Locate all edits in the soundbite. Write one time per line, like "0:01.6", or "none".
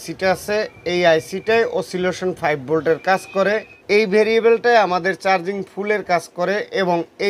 0:03.7